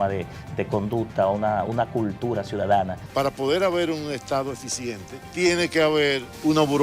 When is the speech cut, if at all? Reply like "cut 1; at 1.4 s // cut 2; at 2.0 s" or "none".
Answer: cut 1; at 3.0 s // cut 2; at 5.2 s